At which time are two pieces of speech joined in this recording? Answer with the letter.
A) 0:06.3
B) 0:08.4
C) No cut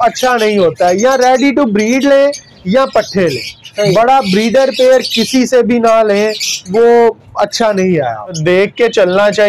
B